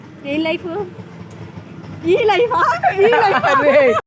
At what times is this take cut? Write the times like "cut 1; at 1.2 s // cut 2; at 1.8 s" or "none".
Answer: none